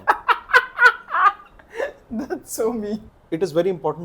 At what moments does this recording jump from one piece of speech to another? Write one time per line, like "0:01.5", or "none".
0:03.1